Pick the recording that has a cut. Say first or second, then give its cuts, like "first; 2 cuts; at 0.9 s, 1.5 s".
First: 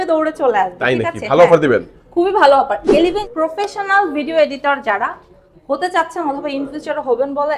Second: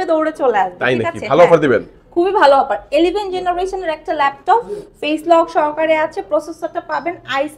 first; 1 cut; at 3.2 s